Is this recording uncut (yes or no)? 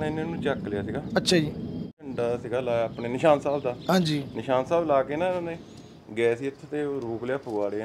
no